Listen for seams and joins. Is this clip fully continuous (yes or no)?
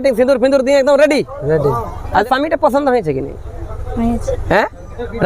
no